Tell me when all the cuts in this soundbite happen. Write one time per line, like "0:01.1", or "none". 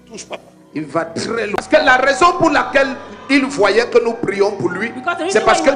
0:01.6